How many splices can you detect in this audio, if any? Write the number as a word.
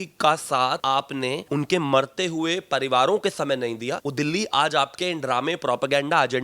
two